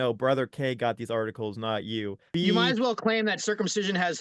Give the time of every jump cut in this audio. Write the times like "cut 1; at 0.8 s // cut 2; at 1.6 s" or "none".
cut 1; at 2.2 s